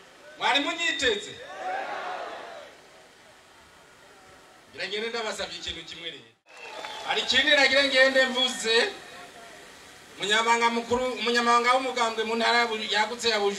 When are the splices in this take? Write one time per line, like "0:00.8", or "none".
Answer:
0:06.7